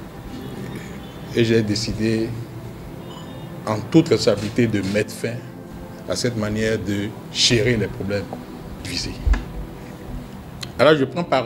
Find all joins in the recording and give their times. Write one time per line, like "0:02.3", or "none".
0:08.8